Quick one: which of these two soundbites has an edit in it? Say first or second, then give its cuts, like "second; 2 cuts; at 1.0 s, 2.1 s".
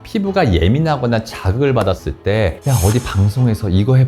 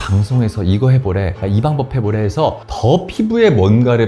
first; 1 cut; at 2.1 s